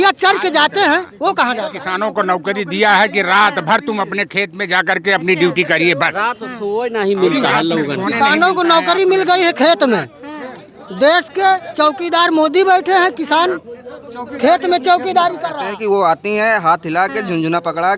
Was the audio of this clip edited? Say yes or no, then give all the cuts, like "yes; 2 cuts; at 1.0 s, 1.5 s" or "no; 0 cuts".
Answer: yes; 2 cuts; at 1.8 s, 15.5 s